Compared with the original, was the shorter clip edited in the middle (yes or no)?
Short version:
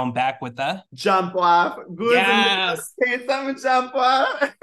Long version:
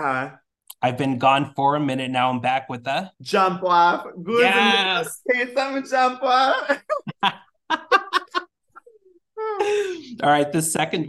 no